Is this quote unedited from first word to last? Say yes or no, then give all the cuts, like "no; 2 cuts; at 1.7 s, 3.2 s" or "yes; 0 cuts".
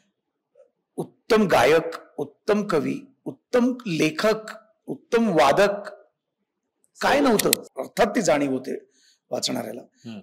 no; 1 cut; at 7.6 s